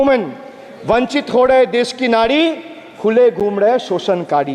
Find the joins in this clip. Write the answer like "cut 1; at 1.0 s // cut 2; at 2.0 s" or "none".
none